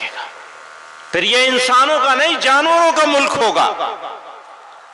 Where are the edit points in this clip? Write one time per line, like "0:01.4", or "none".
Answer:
none